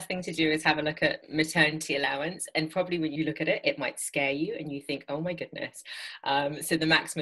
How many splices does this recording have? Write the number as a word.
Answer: two